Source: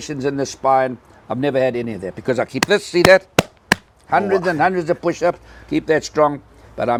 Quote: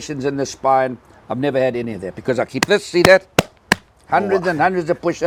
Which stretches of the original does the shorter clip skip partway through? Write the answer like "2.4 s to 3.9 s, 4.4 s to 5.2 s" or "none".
none